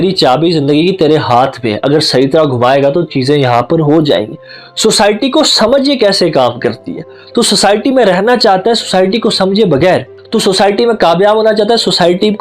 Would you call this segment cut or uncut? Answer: cut